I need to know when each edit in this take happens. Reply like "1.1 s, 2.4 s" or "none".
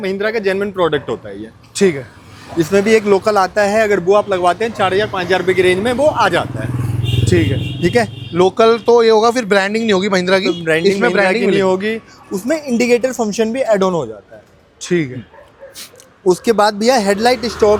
none